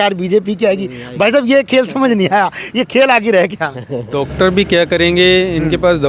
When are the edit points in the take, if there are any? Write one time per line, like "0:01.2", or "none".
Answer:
0:04.1